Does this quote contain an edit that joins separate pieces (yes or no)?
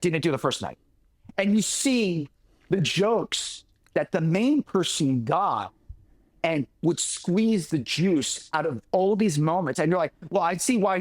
no